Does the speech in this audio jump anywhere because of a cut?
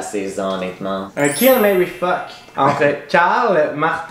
yes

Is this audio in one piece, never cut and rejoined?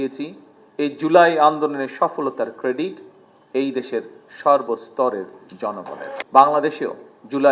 no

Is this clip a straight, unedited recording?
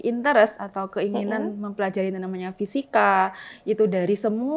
yes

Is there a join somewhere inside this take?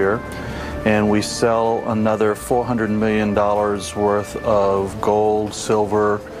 no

